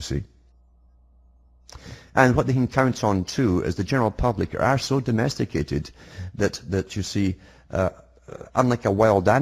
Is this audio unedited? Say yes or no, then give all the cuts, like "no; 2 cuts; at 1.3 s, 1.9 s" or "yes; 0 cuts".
yes; 0 cuts